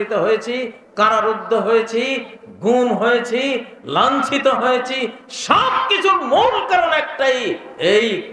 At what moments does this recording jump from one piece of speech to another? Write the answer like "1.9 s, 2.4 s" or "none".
none